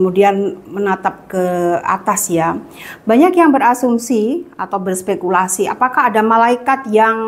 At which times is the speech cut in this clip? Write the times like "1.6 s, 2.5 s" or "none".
none